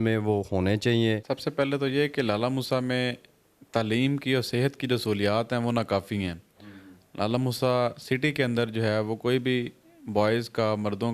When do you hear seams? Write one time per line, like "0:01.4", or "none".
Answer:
none